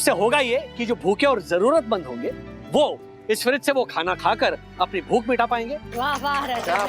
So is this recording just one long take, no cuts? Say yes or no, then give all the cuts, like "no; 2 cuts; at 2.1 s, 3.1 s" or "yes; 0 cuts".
no; 1 cut; at 5.9 s